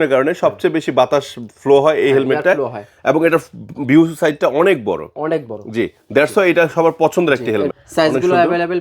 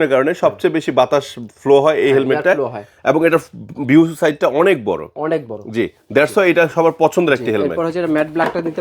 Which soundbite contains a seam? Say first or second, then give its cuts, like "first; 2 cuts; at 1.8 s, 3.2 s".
first; 1 cut; at 7.7 s